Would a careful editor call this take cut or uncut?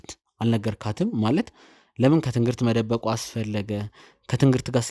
uncut